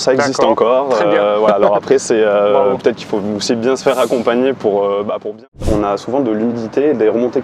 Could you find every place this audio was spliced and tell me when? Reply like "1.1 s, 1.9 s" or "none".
5.6 s

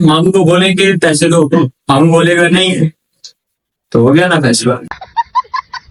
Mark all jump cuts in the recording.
none

